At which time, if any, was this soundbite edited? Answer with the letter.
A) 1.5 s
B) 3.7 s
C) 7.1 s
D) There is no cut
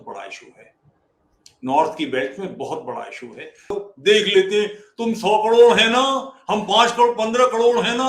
B